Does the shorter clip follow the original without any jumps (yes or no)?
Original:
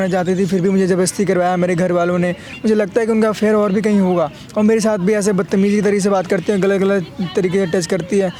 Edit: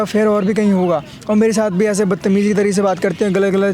yes